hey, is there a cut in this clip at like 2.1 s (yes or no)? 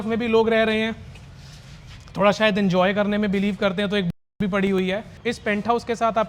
no